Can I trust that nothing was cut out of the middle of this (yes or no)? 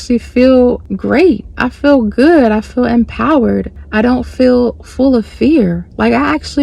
no